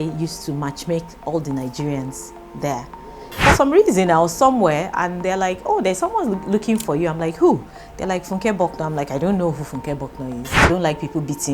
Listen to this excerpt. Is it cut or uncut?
cut